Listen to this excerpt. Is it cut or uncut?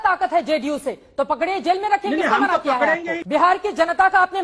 cut